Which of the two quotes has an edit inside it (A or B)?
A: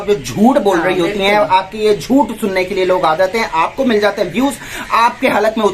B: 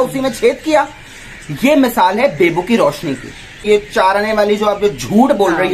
B